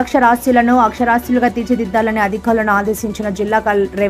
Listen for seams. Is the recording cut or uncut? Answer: uncut